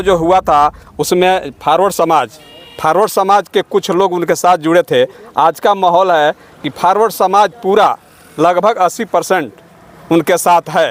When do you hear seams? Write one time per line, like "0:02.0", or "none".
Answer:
none